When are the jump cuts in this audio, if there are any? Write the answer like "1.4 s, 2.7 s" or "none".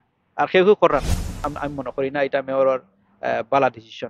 1.5 s